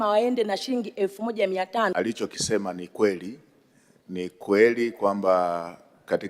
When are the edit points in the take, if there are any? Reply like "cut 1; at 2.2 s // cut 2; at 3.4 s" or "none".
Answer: cut 1; at 1.9 s

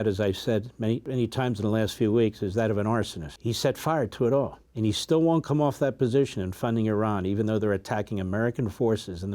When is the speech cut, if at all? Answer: cut 1; at 1.0 s // cut 2; at 3.2 s // cut 3; at 4.6 s

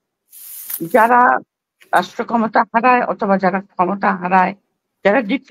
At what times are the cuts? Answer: none

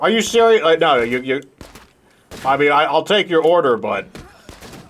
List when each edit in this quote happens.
none

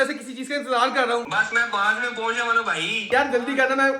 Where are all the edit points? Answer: cut 1; at 1.3 s // cut 2; at 3.1 s

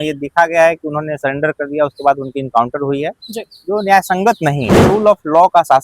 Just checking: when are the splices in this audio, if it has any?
cut 1; at 4.8 s

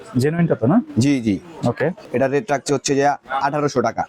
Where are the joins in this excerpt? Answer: cut 1; at 2.0 s

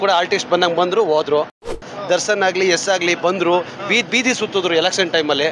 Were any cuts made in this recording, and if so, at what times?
cut 1; at 1.8 s

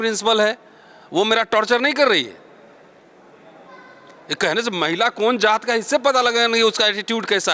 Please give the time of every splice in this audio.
none

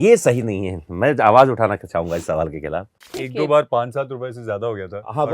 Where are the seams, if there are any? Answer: cut 1; at 3.1 s

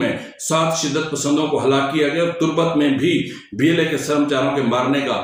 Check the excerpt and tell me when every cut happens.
none

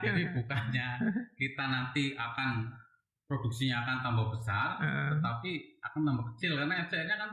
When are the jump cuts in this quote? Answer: none

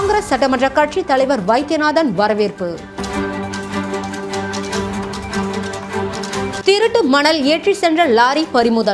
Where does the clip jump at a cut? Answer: none

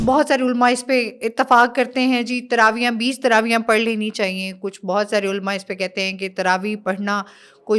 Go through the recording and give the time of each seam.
none

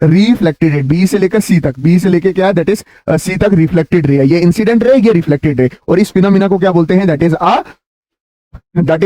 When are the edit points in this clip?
none

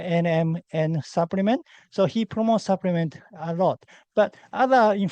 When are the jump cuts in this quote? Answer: none

